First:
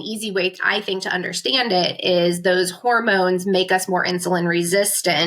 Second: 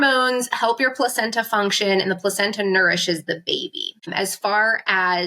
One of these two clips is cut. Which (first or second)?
second